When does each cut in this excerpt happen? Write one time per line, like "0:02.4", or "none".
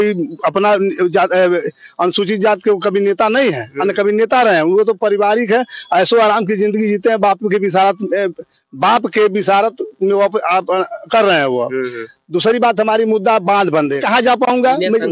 0:14.0